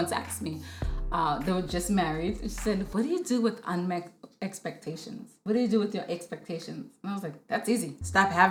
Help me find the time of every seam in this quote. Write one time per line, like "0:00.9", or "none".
none